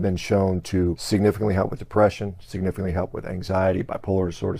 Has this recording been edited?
yes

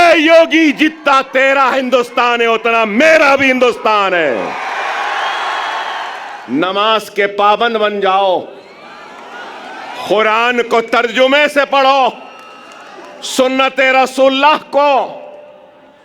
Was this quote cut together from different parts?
yes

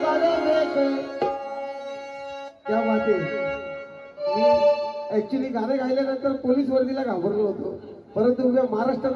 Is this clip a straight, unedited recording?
yes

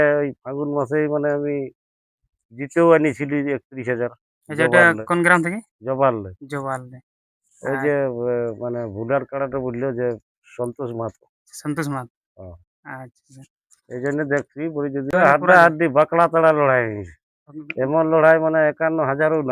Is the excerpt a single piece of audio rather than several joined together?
no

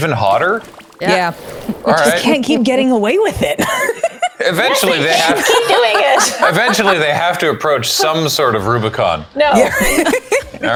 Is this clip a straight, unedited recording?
yes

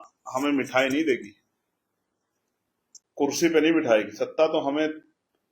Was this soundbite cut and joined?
no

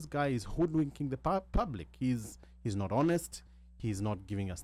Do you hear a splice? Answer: no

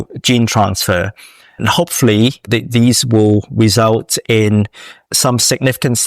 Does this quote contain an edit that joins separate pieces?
no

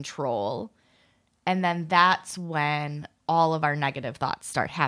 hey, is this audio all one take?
yes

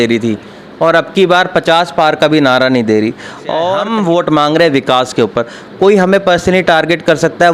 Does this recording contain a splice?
yes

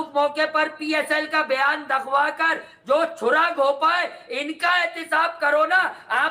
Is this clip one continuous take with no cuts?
yes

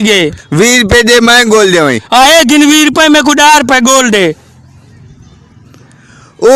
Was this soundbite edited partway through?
no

